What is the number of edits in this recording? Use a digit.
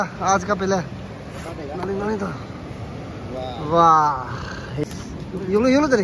1